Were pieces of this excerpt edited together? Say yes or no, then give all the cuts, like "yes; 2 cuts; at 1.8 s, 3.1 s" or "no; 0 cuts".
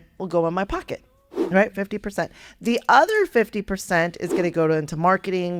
no; 0 cuts